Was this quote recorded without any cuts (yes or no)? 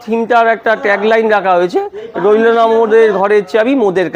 yes